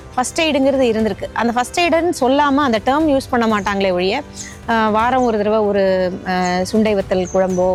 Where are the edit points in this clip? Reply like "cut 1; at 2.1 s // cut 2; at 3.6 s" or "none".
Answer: none